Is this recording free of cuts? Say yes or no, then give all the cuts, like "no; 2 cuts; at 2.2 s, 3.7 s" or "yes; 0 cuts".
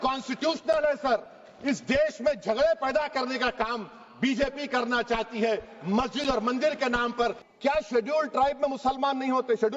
no; 1 cut; at 7.4 s